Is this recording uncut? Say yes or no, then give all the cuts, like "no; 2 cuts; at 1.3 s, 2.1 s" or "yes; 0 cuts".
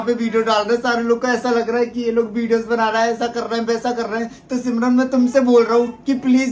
yes; 0 cuts